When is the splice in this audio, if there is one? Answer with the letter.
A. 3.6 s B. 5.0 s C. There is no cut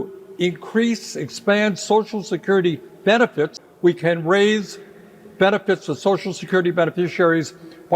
A